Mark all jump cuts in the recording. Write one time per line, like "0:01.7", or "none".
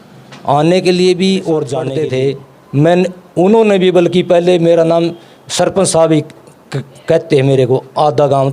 0:01.8